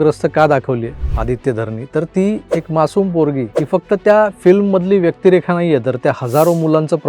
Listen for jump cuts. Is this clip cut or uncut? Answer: cut